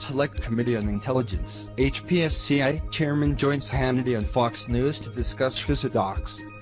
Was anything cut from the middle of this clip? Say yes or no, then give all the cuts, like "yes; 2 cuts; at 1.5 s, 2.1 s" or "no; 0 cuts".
yes; 1 cut; at 5.6 s